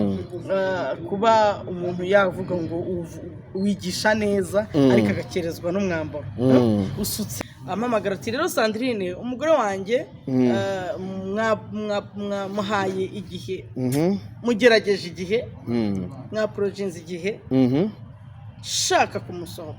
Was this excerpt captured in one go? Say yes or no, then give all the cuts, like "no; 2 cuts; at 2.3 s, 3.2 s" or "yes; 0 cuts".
no; 1 cut; at 7.3 s